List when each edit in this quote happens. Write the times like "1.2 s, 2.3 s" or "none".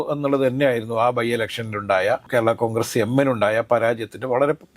none